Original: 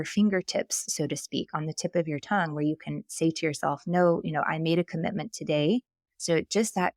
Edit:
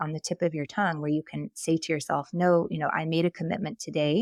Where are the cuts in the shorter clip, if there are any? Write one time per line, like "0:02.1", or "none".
none